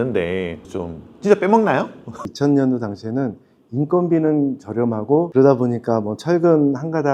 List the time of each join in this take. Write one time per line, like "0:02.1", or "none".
0:02.3
0:05.3